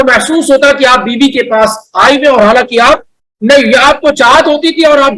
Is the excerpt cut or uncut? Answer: uncut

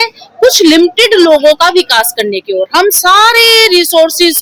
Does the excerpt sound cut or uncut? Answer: uncut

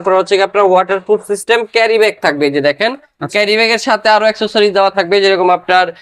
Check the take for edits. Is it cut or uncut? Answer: uncut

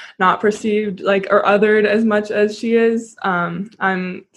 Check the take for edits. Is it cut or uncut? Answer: uncut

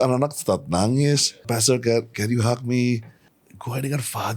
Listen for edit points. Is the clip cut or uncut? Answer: cut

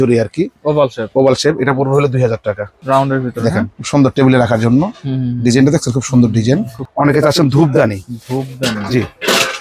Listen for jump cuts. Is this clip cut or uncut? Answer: cut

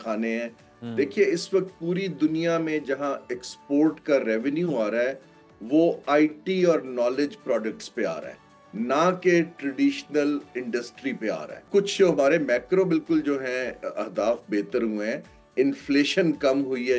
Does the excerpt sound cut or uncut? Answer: cut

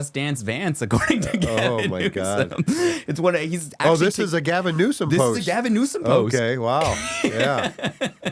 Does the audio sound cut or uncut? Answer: uncut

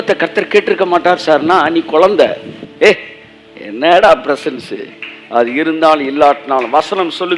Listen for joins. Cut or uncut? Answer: uncut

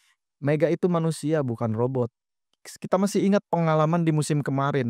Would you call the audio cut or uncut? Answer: cut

